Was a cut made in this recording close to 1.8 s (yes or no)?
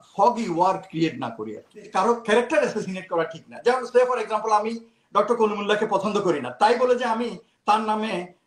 yes